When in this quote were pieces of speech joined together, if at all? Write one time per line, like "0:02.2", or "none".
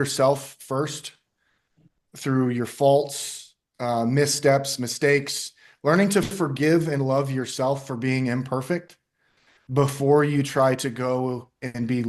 none